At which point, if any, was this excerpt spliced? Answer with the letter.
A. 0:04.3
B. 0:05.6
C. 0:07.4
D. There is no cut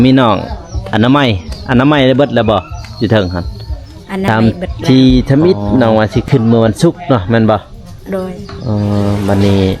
A